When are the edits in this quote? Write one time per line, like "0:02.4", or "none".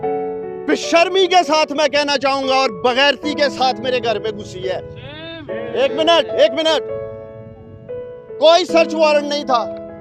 none